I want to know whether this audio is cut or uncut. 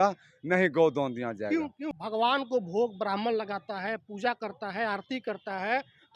cut